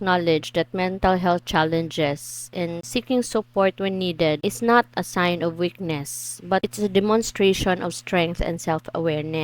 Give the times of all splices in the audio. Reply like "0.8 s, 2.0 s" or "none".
2.8 s, 4.4 s, 6.6 s